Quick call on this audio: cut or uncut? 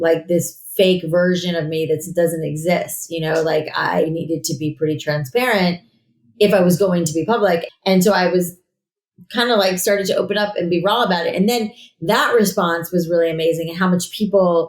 cut